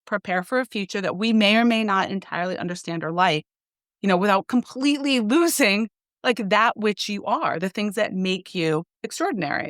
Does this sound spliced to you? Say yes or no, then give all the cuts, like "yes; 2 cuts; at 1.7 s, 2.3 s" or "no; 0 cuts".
no; 0 cuts